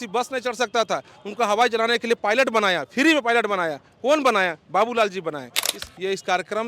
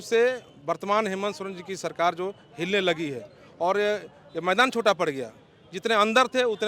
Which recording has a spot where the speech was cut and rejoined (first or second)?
first